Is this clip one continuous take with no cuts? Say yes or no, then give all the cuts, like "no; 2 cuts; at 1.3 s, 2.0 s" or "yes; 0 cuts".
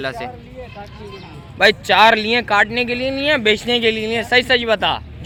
yes; 0 cuts